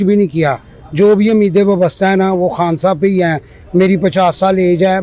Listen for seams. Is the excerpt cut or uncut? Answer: uncut